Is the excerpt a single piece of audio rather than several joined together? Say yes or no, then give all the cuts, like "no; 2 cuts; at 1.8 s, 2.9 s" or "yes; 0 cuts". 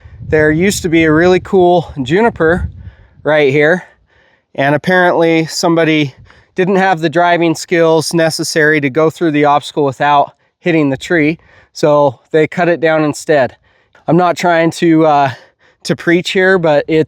no; 1 cut; at 13.8 s